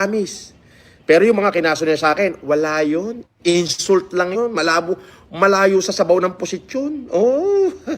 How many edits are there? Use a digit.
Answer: 1